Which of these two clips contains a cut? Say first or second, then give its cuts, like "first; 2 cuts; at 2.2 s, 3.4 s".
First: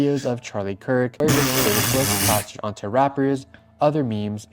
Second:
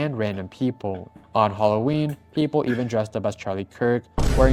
first; 1 cut; at 1.1 s